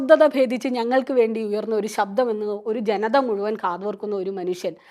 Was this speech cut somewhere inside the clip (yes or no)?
no